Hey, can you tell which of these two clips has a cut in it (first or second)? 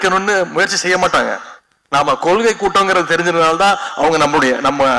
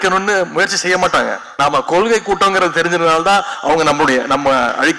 second